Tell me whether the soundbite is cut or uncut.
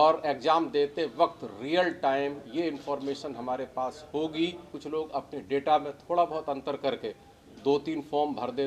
cut